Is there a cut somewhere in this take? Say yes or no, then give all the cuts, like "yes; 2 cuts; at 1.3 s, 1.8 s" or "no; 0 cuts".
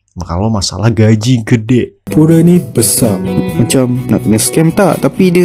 yes; 1 cut; at 2.1 s